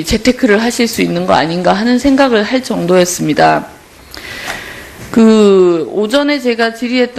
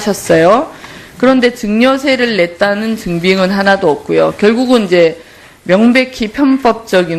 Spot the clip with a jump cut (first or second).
first